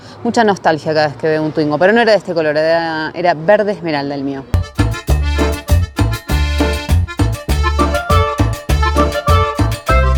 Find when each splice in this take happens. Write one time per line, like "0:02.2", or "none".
none